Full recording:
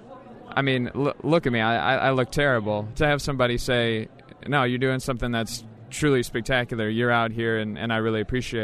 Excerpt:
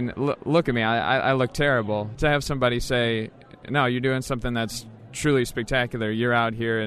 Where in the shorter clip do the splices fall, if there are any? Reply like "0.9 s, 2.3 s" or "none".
none